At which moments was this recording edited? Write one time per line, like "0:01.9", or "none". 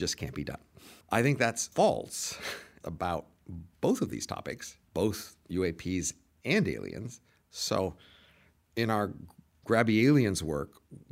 0:00.9
0:01.6
0:02.8
0:04.7